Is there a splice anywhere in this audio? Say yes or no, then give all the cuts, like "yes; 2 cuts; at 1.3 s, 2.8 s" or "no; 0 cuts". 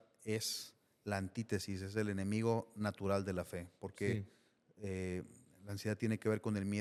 no; 0 cuts